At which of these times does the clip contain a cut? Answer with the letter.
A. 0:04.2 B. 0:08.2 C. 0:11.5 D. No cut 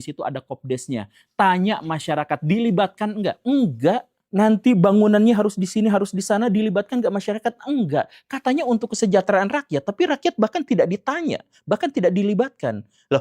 A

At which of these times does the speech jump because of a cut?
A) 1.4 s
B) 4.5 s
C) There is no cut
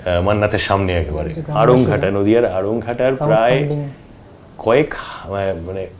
A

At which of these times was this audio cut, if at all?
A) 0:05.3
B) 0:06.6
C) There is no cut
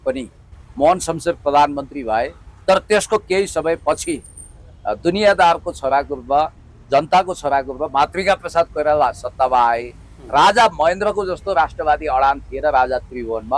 C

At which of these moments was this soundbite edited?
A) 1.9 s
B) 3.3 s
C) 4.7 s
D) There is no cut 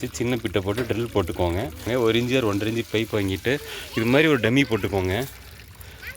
A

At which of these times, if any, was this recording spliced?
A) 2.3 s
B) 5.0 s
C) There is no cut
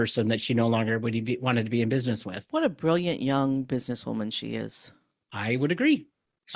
A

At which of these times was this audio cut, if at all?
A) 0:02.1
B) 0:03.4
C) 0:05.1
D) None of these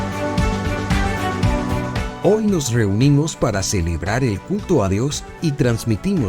A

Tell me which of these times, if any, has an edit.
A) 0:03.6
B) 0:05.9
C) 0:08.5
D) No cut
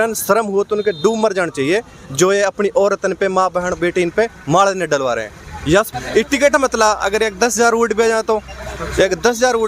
B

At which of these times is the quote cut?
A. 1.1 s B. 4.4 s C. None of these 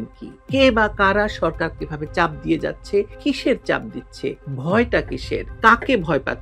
B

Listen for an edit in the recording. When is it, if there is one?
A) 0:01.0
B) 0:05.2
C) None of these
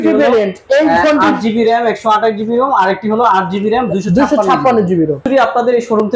B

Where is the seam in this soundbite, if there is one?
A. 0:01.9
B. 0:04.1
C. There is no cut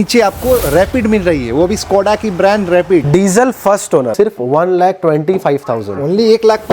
B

